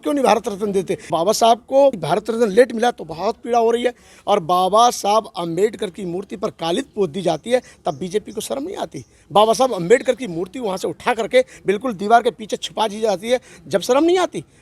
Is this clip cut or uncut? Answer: cut